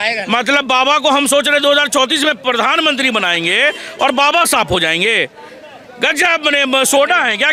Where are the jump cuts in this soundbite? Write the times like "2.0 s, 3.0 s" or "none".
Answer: none